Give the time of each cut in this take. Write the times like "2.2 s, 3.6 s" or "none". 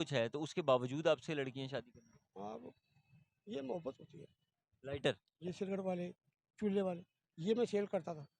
4.4 s